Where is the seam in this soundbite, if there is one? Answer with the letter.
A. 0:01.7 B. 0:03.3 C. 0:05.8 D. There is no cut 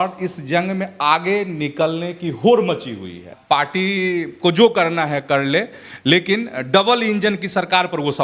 B